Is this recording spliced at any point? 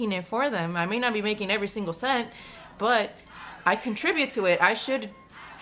no; 0 cuts

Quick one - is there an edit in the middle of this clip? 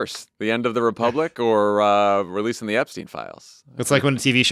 no; 0 cuts

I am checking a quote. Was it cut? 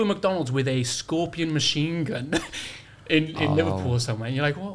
no; 0 cuts

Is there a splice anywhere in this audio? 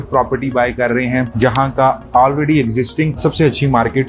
yes; 1 cut; at 1.3 s

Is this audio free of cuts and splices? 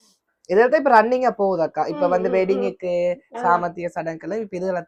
yes; 0 cuts

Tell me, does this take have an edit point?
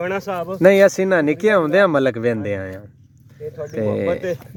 no; 0 cuts

